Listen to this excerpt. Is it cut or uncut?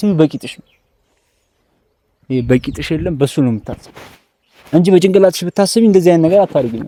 uncut